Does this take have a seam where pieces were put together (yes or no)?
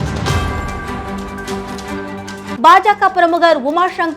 yes